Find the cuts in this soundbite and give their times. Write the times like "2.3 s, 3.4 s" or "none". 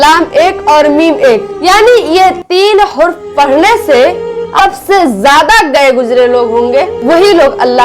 4.5 s